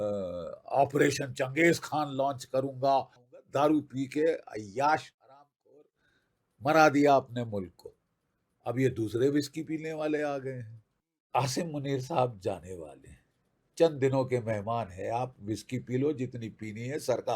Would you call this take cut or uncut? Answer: cut